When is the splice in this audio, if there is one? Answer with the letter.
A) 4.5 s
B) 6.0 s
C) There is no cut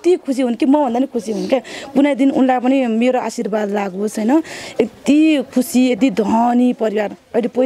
C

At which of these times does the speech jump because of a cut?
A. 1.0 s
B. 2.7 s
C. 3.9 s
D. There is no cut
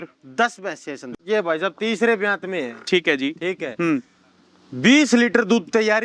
A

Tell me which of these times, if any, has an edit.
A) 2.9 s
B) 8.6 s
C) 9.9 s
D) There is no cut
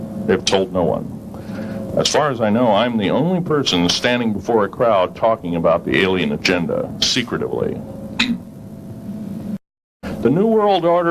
C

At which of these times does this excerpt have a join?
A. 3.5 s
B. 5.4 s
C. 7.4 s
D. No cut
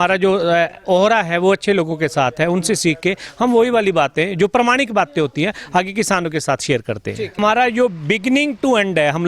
C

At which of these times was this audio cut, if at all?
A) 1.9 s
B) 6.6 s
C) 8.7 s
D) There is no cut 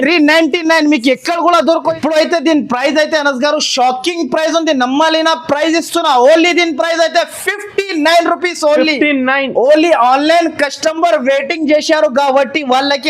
A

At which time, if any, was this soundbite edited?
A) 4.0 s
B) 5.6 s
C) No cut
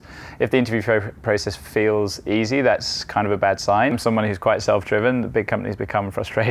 A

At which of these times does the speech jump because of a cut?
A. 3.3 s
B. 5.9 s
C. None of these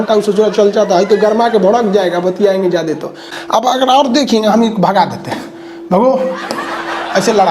A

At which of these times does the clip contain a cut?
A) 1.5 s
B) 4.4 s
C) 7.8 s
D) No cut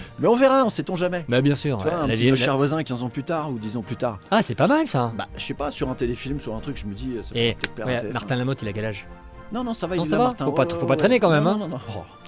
D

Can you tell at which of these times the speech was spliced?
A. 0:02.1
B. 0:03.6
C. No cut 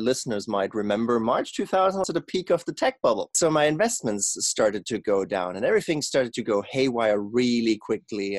A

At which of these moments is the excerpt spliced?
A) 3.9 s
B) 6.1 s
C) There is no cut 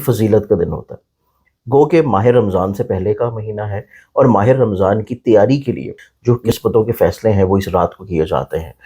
B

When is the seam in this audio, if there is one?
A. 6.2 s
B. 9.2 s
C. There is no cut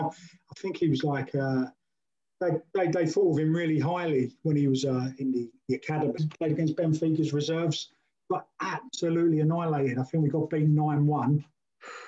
A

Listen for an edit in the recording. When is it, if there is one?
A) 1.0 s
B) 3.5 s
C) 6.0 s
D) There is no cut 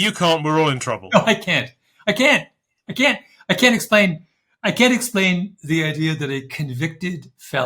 A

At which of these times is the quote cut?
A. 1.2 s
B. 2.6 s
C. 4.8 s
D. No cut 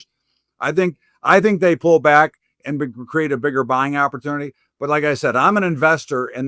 D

